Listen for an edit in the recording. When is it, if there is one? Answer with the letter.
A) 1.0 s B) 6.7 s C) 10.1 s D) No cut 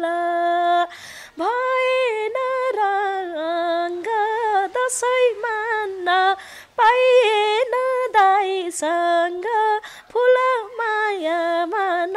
D